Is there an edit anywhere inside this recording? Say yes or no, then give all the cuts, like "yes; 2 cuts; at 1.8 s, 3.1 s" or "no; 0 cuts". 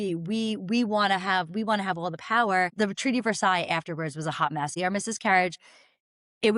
yes; 2 cuts; at 2.7 s, 4.7 s